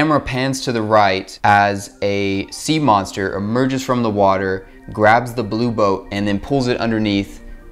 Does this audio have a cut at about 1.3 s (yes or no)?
yes